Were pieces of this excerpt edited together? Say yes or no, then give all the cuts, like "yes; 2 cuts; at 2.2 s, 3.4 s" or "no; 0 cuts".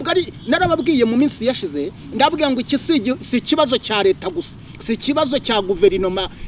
no; 0 cuts